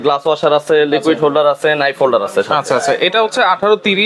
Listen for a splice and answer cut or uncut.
uncut